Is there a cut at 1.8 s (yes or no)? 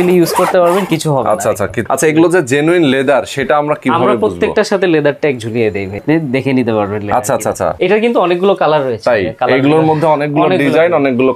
yes